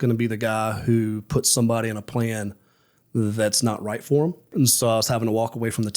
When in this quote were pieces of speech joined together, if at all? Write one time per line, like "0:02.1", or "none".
0:04.5